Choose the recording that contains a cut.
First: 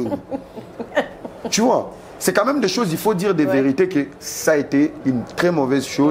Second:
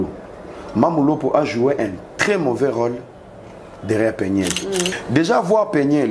second; 1 cut; at 5.0 s

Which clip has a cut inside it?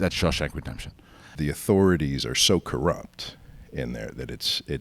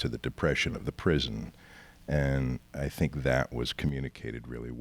first; 1 cut; at 1.3 s

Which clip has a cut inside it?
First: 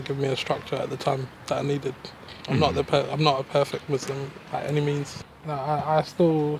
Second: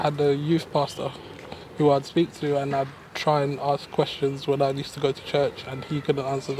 first; 2 cuts; at 2.3 s, 5.1 s

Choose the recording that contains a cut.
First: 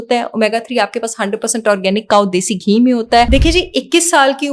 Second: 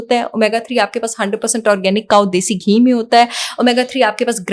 first; 1 cut; at 3.3 s

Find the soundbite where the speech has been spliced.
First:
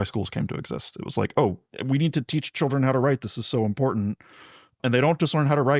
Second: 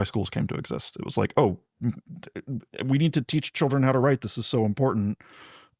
first; 2 cuts; at 1.7 s, 4.8 s

